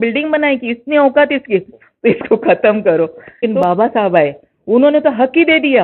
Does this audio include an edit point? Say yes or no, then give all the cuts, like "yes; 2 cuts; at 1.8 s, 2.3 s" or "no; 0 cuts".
yes; 1 cut; at 3.5 s